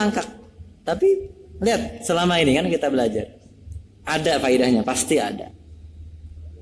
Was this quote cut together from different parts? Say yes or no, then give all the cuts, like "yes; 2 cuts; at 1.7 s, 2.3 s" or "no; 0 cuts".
no; 0 cuts